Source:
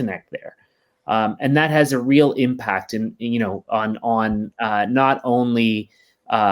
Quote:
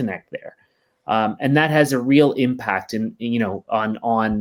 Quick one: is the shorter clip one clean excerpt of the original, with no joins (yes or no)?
yes